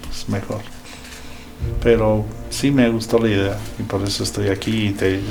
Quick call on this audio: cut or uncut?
uncut